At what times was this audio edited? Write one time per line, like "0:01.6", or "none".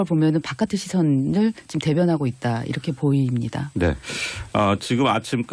0:02.2